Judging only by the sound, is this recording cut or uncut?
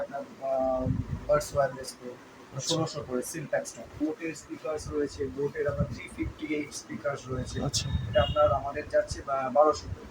cut